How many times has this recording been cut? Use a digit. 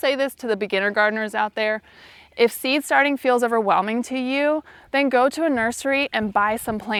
0